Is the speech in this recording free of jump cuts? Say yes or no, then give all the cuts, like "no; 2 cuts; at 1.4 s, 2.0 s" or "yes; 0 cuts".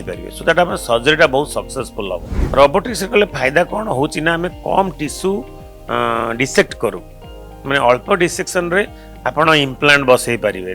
no; 1 cut; at 2.3 s